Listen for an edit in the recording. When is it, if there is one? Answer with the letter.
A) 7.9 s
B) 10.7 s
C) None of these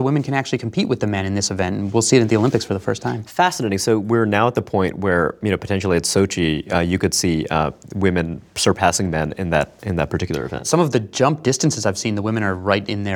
B